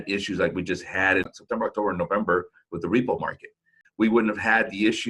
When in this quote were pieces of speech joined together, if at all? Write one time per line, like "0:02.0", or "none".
0:01.4
0:03.8

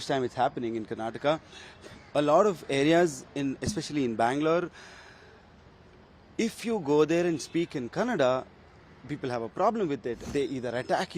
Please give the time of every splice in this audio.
0:10.2

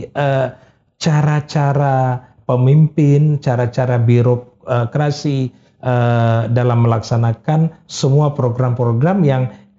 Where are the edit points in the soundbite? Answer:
none

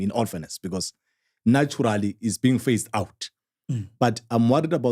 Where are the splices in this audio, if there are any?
none

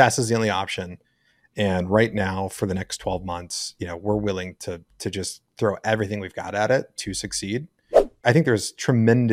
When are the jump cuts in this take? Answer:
0:08.0

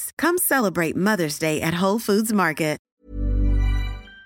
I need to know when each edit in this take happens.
0:02.9

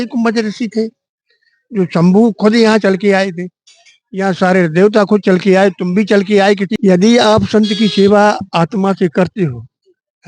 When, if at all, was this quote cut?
0:06.7

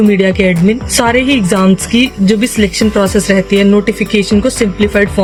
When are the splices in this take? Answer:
none

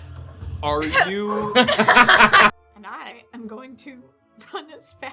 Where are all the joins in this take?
0:02.5

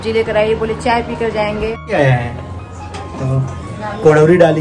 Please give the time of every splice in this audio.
0:01.9

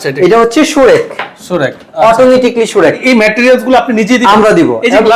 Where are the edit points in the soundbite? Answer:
0:03.0

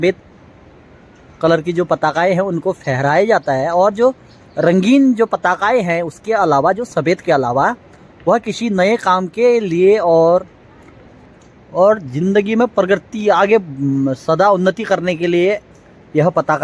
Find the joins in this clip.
none

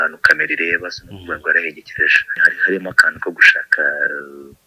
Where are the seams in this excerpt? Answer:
0:02.5

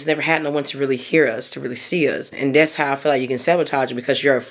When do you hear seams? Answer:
0:02.3

